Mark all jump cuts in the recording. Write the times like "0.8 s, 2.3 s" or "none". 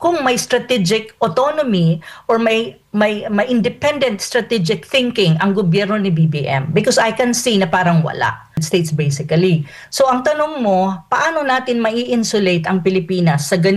8.6 s